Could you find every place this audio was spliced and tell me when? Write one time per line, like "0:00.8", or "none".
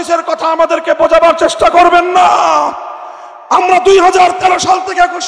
none